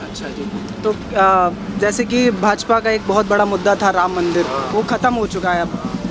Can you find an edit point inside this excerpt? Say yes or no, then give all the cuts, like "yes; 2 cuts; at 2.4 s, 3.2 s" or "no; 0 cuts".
no; 0 cuts